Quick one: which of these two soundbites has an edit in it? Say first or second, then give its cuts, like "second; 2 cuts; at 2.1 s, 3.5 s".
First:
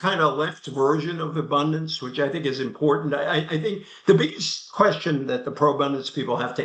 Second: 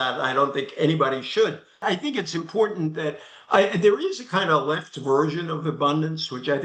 second; 1 cut; at 1.8 s